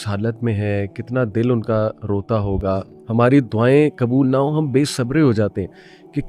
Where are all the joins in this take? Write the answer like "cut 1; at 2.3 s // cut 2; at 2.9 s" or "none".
cut 1; at 2.9 s